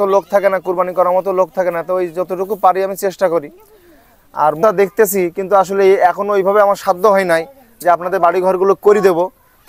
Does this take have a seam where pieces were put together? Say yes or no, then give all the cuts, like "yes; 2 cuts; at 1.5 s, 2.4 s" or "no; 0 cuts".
yes; 1 cut; at 4.6 s